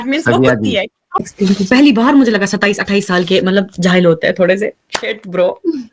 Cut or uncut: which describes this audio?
cut